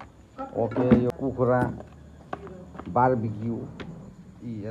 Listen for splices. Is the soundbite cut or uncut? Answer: cut